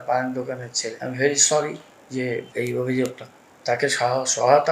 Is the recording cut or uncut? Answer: cut